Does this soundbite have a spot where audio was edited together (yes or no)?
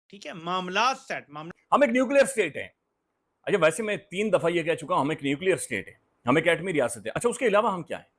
yes